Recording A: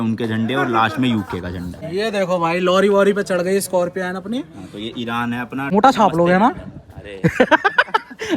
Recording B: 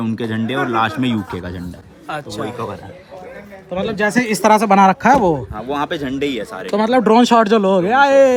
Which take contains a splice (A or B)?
A